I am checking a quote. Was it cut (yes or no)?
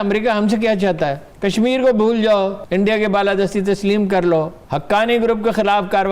yes